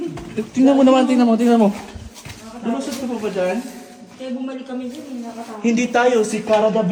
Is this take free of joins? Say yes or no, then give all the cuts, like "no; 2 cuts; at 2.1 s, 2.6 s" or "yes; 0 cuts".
yes; 0 cuts